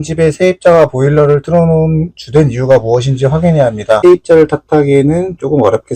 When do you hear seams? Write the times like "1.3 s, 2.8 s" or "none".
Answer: 4.0 s